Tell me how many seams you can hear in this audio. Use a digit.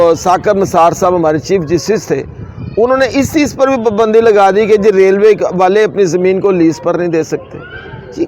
0